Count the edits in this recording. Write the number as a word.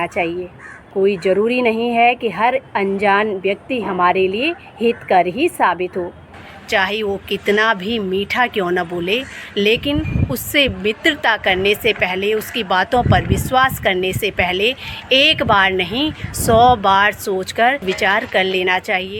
one